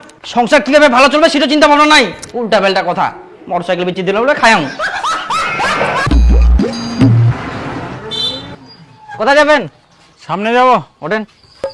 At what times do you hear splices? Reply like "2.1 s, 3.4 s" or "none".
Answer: none